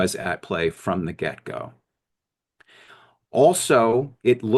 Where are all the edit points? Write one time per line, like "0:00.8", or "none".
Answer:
none